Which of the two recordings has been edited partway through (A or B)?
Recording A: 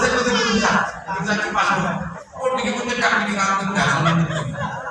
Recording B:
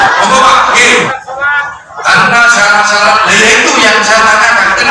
B